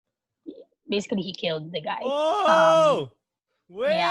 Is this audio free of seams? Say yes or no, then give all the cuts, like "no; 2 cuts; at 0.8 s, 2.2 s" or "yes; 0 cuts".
no; 1 cut; at 2.5 s